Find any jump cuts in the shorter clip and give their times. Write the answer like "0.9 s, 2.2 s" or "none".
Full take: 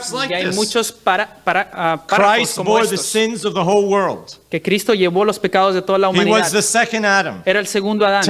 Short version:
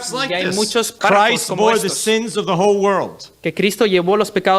0.9 s